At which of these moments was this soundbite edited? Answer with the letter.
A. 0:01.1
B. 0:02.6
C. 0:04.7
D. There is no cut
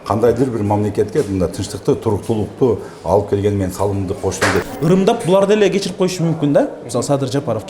C